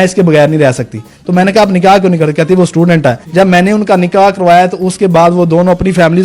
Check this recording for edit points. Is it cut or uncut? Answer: uncut